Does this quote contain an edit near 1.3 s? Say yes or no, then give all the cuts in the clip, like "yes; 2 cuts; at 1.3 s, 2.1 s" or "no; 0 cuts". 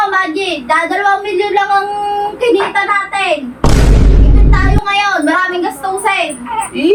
no; 0 cuts